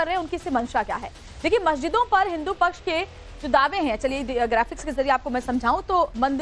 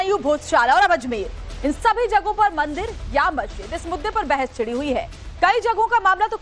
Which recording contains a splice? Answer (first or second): second